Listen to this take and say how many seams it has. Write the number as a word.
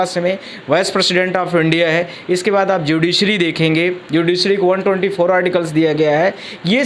zero